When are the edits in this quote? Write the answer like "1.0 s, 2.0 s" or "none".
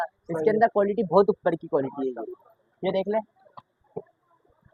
none